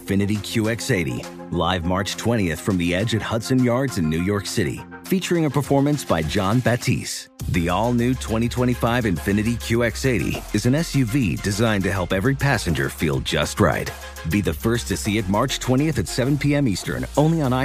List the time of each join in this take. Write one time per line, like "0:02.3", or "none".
none